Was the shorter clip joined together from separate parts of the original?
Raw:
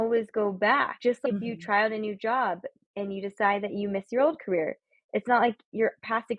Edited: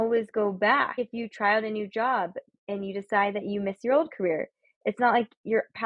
yes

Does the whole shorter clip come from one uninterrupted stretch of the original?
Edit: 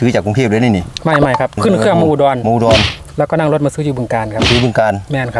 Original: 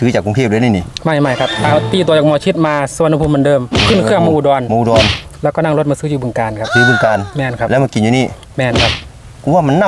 no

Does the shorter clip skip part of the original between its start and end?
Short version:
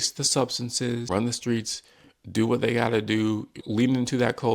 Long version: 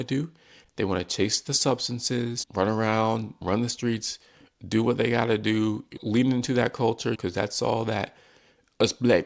yes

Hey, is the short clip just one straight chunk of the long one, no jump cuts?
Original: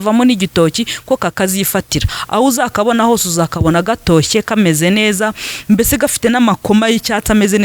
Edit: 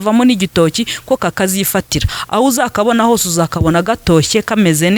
yes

